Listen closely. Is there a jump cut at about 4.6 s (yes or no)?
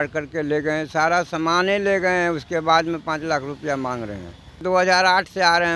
yes